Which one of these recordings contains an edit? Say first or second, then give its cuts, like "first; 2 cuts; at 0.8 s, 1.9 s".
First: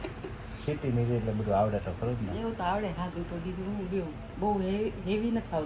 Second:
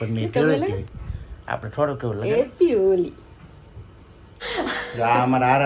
second; 1 cut; at 4.4 s